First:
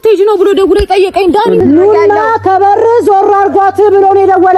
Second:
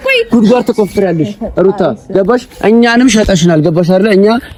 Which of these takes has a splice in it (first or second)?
first